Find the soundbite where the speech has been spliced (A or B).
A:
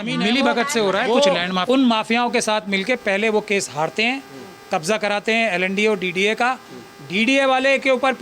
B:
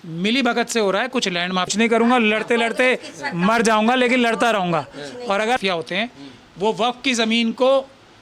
A